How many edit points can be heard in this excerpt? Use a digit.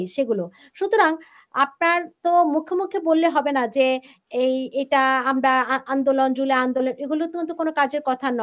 0